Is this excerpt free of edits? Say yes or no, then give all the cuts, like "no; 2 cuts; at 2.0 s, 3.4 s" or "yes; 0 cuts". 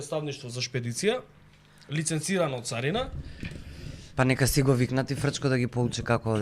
yes; 0 cuts